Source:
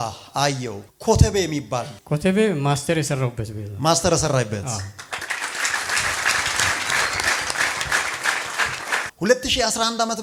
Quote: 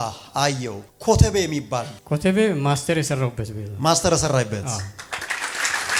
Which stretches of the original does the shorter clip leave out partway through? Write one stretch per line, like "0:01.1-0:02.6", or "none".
none